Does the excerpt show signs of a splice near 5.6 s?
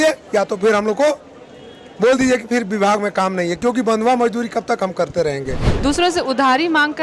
yes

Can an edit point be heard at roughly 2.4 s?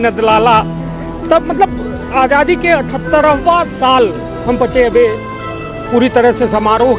no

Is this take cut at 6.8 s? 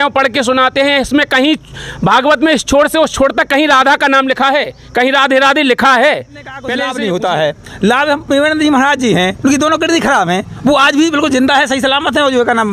yes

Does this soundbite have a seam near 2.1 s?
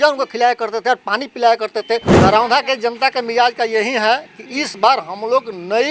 yes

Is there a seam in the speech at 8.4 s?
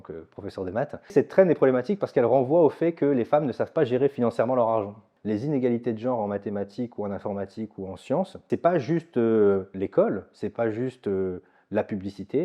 yes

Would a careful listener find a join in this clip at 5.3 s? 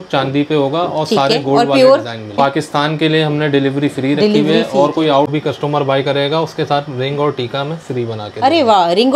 yes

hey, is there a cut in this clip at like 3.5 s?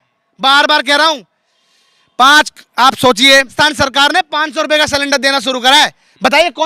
yes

